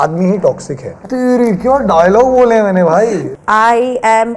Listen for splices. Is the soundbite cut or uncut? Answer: cut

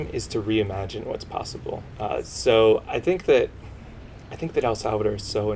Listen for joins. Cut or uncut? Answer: cut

